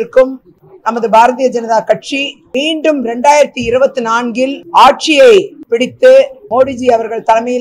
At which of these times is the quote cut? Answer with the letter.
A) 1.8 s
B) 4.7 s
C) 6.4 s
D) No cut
C